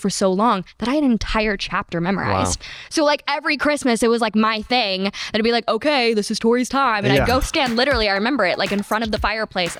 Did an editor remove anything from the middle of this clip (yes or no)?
no